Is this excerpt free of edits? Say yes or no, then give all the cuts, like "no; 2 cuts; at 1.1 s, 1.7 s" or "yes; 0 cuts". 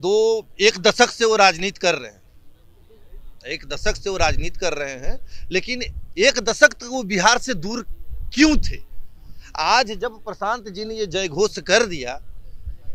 yes; 0 cuts